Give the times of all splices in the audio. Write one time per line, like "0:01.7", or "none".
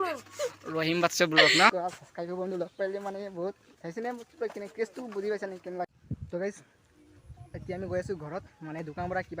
0:01.7
0:03.7
0:06.0